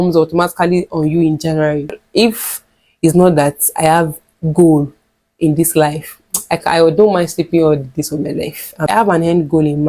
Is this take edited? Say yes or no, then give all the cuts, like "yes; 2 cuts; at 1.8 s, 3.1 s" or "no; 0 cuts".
yes; 2 cuts; at 1.8 s, 8.8 s